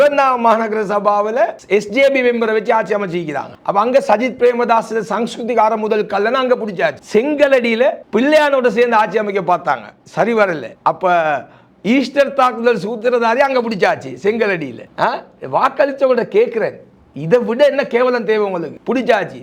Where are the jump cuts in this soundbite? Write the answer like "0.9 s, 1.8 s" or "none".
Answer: none